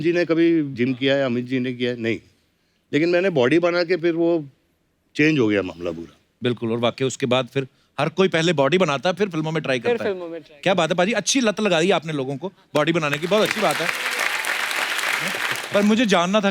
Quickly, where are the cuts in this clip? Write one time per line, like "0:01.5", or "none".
0:15.5